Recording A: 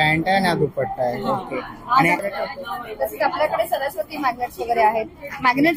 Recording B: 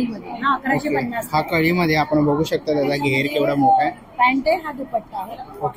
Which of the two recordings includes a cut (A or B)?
A